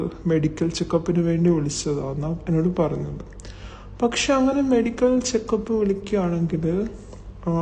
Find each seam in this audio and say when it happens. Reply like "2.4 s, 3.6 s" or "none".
5.6 s

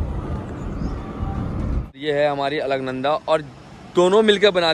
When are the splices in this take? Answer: 2.0 s

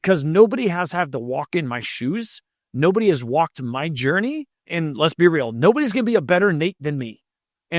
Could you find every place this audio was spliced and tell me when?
4.7 s

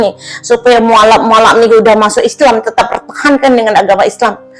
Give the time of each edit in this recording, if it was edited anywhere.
none

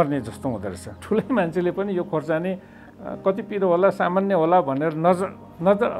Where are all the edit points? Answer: 1.0 s

